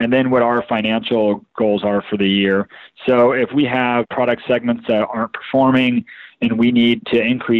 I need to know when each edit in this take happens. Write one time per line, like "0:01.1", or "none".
0:04.1

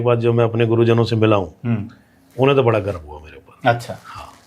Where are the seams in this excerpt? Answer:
none

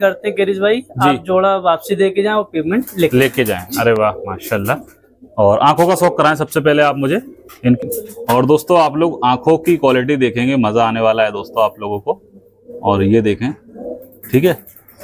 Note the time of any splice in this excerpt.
none

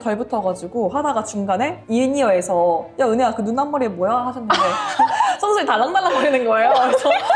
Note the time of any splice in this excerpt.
none

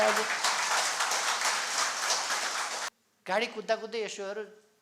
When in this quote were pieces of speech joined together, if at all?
0:02.8

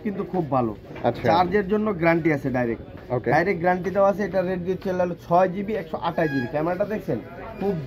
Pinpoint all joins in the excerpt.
none

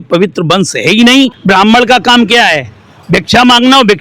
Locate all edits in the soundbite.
0:01.4

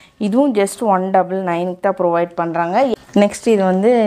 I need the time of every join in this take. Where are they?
0:02.9

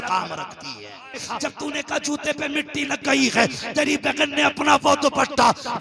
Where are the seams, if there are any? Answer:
0:01.2

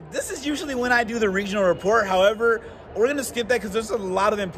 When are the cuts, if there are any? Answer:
none

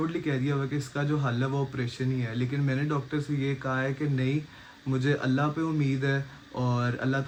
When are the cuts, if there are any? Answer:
none

